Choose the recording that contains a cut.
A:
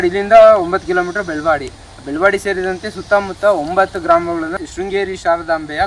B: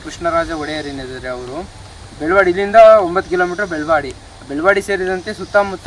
A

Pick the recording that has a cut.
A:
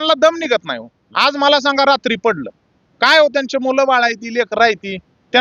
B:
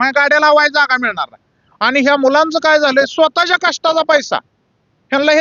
A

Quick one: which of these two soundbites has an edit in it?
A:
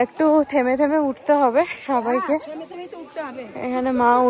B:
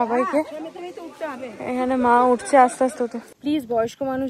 B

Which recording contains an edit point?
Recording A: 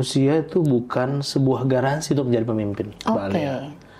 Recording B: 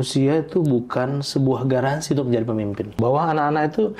B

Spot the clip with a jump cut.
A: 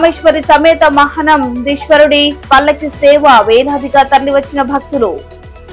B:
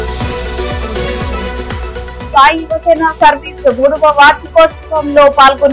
B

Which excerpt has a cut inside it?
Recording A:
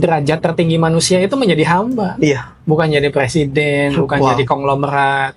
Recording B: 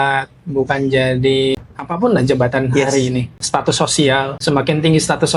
B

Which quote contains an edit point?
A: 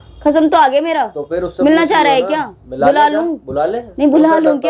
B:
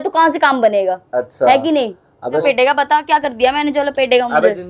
B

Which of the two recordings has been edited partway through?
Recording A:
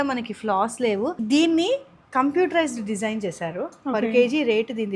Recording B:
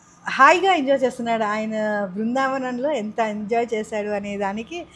A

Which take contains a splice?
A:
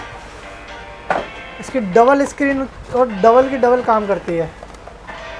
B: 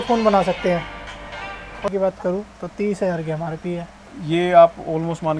B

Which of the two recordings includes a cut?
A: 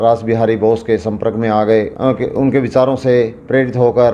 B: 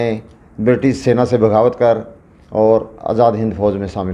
A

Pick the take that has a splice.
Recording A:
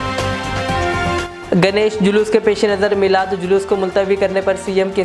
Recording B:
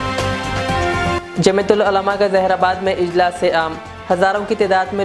A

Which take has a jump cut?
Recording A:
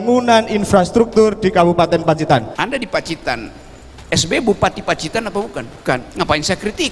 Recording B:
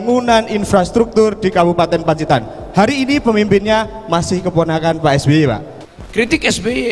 A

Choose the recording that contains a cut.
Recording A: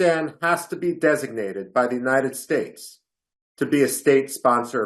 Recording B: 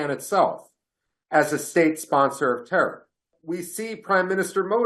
B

